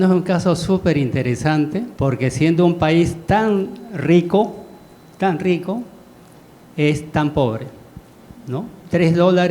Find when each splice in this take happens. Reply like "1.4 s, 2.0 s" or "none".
1.9 s